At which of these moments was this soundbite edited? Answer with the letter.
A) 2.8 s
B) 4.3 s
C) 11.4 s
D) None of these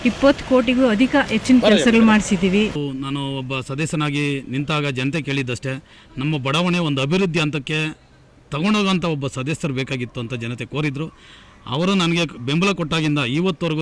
A